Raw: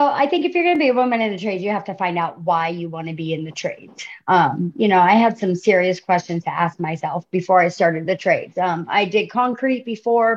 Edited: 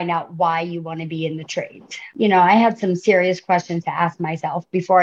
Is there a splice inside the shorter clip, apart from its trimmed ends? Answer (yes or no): yes